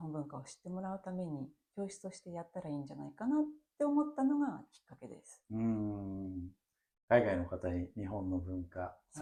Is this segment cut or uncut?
uncut